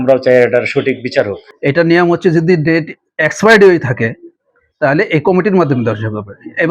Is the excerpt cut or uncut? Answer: cut